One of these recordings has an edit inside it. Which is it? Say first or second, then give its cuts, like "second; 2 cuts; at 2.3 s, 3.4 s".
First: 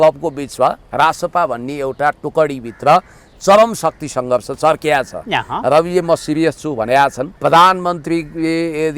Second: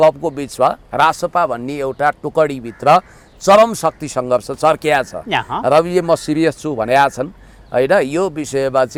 first; 1 cut; at 7.3 s